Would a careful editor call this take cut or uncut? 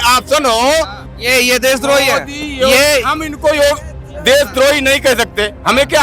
cut